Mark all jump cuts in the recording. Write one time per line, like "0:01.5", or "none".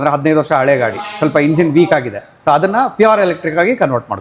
none